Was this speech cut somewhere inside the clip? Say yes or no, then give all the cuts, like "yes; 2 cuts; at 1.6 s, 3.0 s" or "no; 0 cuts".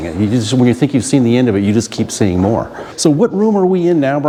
no; 0 cuts